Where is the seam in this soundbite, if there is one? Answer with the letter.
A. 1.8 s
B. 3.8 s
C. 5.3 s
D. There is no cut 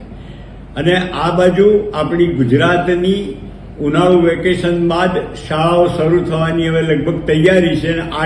D